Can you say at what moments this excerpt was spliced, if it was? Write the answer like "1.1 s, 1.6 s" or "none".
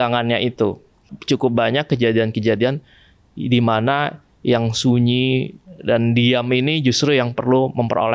1.1 s